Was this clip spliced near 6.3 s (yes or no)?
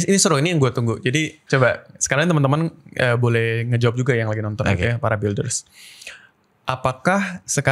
no